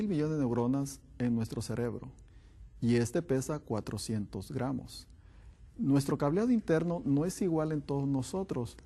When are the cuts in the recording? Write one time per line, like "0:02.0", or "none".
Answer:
0:07.3